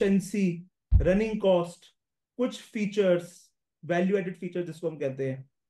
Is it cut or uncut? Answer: uncut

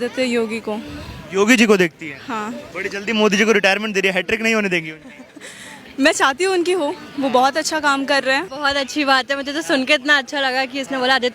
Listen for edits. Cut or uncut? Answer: cut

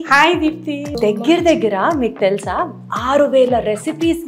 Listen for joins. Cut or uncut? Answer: cut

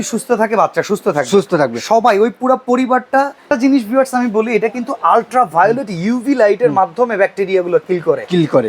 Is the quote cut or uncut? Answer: cut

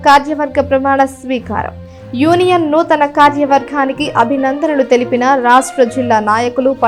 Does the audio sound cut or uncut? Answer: uncut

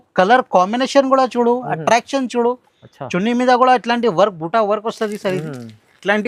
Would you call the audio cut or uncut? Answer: uncut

